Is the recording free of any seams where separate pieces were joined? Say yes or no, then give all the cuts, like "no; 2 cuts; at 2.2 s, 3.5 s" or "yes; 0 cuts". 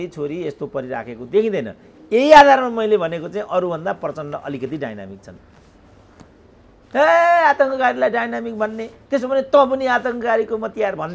yes; 0 cuts